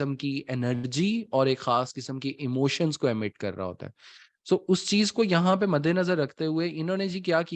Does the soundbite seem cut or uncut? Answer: uncut